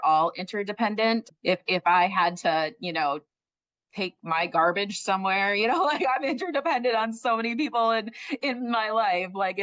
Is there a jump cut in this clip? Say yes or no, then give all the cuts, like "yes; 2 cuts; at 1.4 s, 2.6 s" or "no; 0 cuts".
yes; 1 cut; at 1.3 s